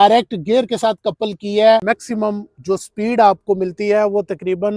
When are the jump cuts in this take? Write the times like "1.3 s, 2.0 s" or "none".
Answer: 1.8 s